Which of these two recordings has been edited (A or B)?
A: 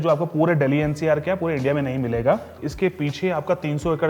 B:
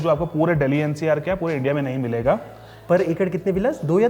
A